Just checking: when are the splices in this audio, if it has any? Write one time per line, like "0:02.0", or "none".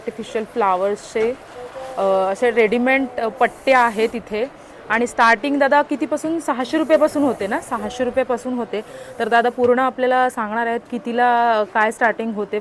none